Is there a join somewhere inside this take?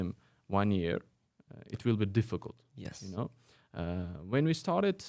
no; 0 cuts

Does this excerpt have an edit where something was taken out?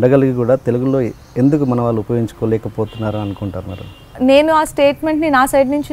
yes; 1 cut; at 4.1 s

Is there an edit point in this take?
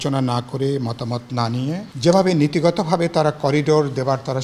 yes; 1 cut; at 1.9 s

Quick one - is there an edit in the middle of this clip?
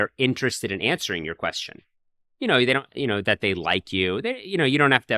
no; 0 cuts

